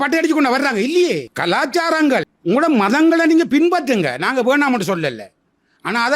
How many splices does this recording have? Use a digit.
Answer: 0